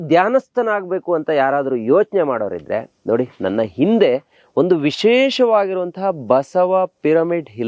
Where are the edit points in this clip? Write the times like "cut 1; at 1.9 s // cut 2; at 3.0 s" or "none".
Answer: none